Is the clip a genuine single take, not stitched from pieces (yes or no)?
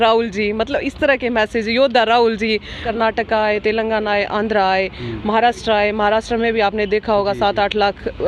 no